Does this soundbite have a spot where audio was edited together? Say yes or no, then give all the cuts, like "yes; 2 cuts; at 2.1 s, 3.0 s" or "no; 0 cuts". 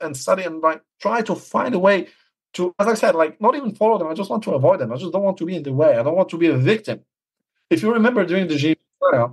no; 0 cuts